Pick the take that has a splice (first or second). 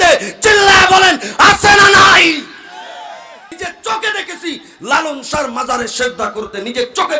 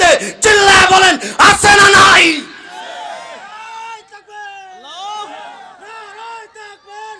first